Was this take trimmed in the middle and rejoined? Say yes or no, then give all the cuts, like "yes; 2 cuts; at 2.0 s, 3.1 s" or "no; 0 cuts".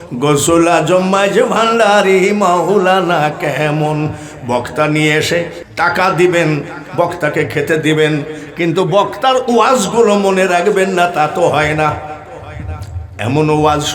no; 0 cuts